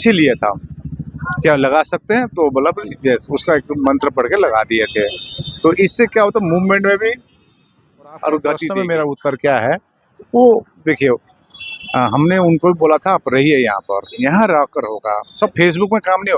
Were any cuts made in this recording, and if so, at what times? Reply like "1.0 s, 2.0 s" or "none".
8.8 s